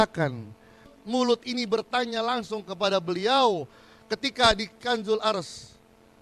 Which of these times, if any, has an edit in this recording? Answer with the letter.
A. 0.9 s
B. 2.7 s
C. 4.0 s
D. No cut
A